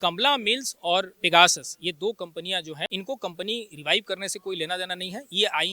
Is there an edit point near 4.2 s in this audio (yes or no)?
no